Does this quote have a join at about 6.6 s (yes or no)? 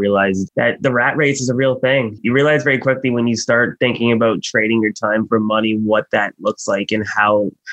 no